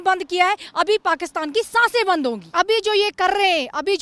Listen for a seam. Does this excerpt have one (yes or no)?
yes